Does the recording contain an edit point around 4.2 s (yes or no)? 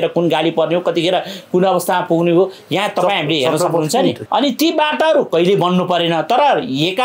yes